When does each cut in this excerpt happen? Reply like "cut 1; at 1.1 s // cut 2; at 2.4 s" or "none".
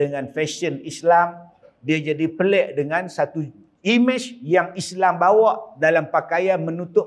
none